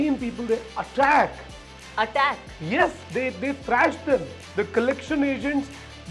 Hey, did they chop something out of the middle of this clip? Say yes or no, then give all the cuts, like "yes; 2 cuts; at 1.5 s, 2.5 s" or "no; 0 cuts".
no; 0 cuts